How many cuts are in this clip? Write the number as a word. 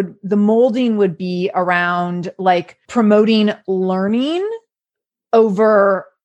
one